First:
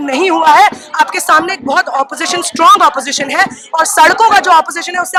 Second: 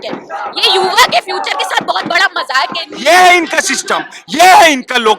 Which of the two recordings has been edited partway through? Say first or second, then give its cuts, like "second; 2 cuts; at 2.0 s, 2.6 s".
second; 1 cut; at 2.9 s